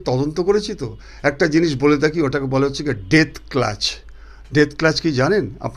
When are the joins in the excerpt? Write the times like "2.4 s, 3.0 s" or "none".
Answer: none